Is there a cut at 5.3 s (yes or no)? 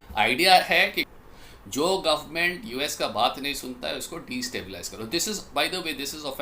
no